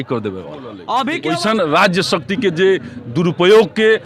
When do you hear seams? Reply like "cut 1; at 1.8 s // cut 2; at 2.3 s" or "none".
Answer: cut 1; at 1.1 s